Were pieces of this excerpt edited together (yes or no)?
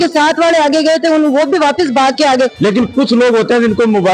yes